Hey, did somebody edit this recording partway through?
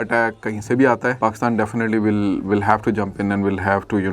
yes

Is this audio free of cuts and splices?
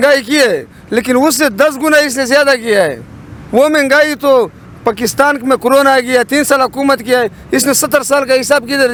yes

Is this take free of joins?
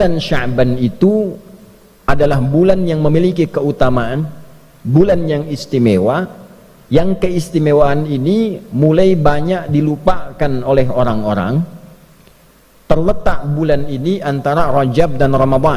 yes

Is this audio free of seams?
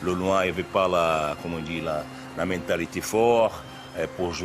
yes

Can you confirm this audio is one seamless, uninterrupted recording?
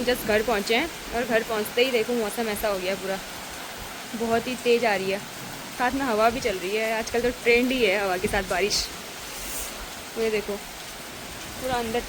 yes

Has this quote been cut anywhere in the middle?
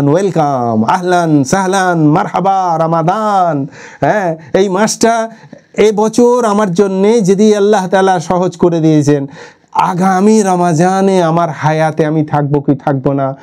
no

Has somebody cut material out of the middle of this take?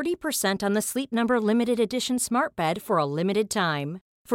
no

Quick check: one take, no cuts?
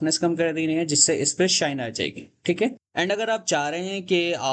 yes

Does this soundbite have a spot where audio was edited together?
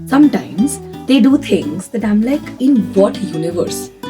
yes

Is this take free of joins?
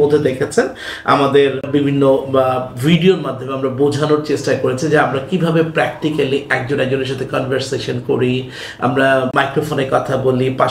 no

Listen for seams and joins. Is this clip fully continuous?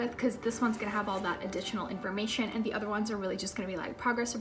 yes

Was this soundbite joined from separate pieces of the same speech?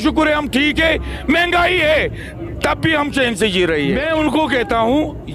yes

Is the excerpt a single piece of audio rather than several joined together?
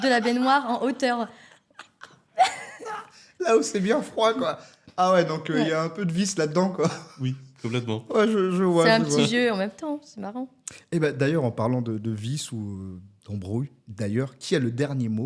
yes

